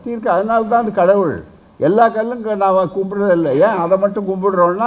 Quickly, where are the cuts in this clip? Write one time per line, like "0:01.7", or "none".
none